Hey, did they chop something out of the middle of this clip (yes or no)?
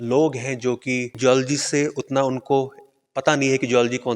yes